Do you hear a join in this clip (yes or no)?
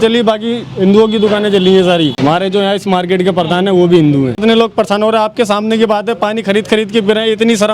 yes